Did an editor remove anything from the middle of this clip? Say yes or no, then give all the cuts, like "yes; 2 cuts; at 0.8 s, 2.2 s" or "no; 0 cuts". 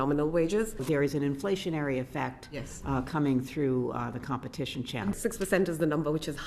yes; 2 cuts; at 0.8 s, 5.1 s